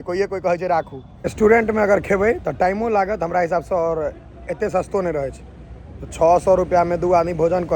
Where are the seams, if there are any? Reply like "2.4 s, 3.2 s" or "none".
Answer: 1.0 s